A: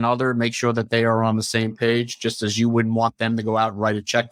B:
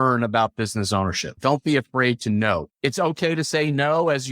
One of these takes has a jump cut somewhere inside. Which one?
B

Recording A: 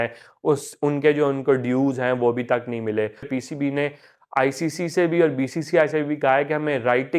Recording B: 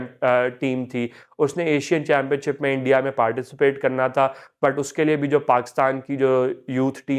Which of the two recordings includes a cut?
A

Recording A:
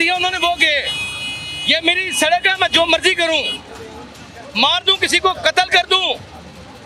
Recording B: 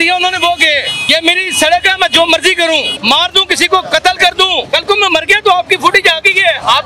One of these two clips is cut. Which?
B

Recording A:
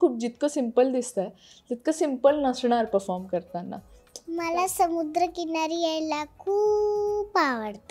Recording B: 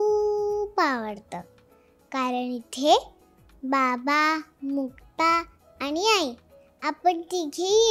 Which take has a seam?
A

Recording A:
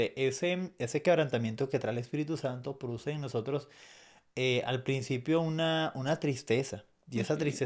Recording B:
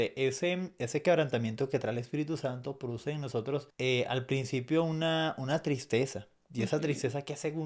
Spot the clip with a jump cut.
B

